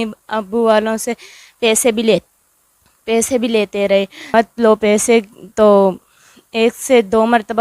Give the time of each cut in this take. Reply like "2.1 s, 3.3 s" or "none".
4.3 s